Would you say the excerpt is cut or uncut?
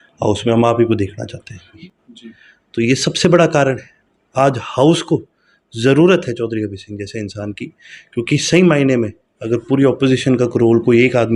cut